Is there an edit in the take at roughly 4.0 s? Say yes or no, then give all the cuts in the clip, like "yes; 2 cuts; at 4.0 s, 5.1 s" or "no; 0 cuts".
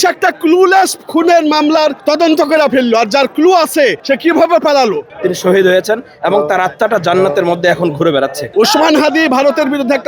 yes; 4 cuts; at 2.0 s, 4.0 s, 5.1 s, 8.4 s